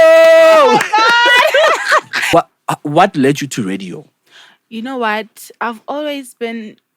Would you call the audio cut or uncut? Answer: cut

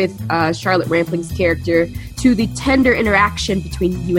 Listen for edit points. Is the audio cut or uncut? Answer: cut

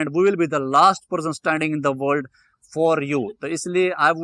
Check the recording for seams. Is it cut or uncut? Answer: uncut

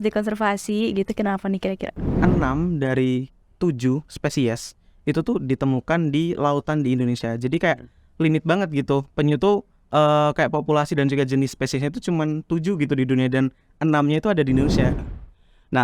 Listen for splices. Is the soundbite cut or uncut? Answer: cut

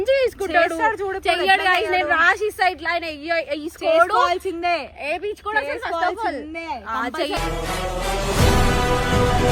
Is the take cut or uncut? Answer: uncut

